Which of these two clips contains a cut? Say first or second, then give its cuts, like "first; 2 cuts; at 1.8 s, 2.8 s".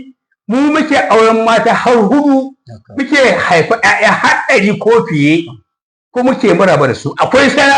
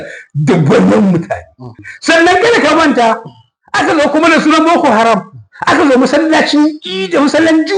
second; 1 cut; at 1.8 s